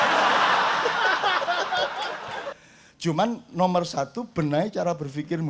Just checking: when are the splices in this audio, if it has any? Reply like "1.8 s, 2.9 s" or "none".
2.5 s

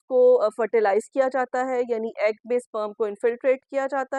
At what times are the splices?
none

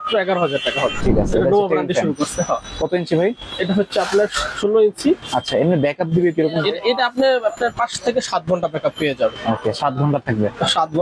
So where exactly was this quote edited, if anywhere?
1.0 s, 5.2 s

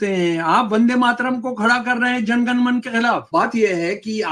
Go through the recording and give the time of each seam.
3.2 s

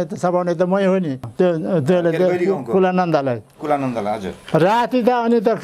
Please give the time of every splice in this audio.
1.3 s

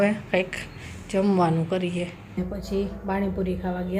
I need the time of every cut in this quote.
2.4 s

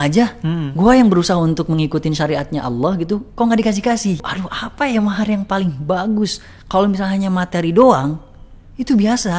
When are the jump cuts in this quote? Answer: 4.2 s

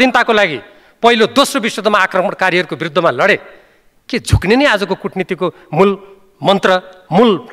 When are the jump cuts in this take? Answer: none

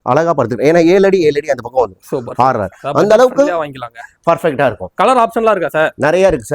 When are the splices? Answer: none

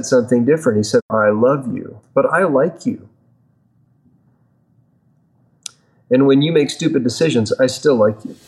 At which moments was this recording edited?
1.7 s

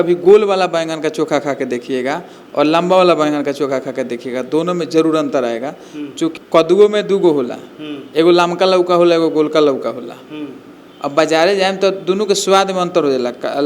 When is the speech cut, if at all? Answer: 6.4 s

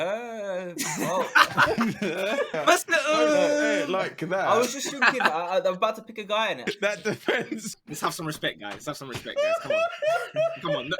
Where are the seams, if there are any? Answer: 2.5 s, 6.6 s, 7.7 s

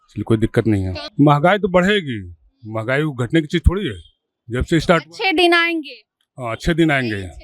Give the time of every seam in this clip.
1.0 s

